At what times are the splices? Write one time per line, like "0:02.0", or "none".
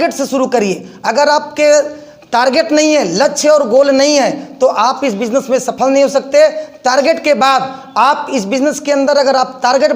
none